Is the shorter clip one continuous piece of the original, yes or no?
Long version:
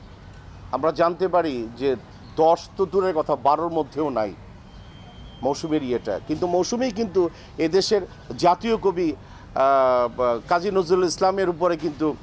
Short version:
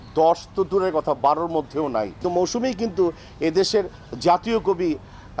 no